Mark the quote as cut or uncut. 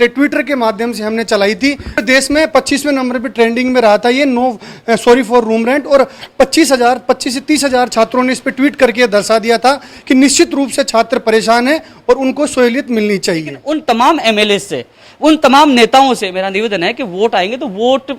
cut